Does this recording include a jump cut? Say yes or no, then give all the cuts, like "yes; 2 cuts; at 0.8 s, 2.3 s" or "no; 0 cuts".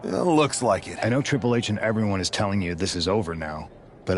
yes; 1 cut; at 0.9 s